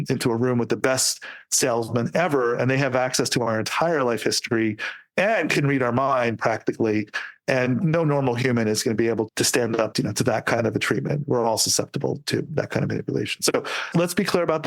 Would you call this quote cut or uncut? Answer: uncut